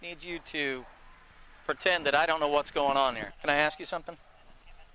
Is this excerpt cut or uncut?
cut